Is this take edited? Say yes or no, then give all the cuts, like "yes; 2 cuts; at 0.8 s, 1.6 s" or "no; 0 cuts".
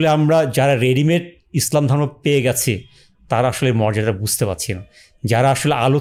no; 0 cuts